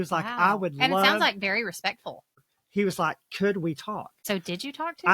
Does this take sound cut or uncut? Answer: cut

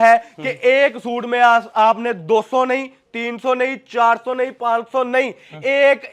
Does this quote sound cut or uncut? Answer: uncut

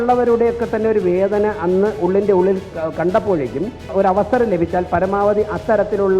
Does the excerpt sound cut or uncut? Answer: cut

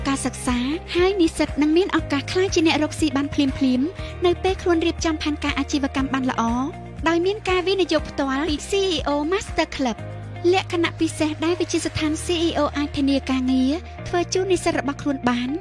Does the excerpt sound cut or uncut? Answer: uncut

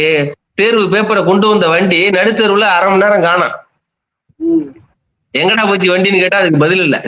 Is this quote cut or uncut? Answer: uncut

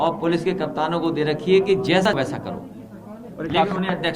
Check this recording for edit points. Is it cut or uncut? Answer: cut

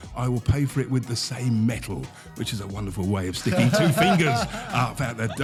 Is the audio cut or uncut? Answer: uncut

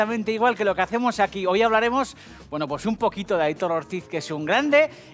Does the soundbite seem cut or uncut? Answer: cut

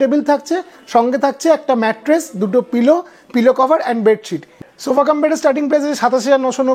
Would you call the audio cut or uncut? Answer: cut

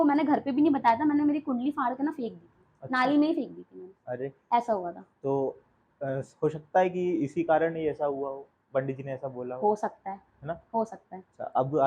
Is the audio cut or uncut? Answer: uncut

